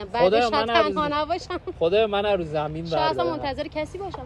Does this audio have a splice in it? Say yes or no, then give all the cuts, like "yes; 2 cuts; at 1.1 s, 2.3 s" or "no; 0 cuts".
no; 0 cuts